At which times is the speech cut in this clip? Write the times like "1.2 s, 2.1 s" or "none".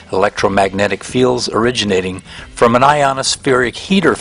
none